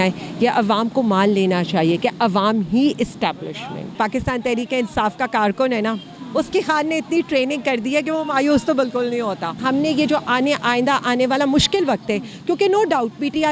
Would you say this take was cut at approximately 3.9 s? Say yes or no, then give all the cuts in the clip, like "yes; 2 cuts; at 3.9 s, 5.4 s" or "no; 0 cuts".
yes; 2 cuts; at 3.9 s, 9.6 s